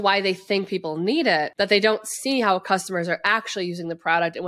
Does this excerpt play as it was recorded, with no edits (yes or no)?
no